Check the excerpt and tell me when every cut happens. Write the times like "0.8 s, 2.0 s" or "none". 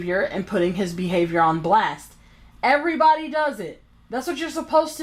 3.9 s